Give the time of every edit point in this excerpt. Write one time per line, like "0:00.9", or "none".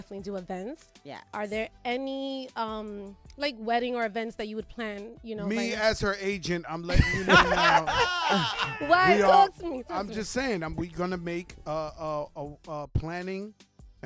0:03.6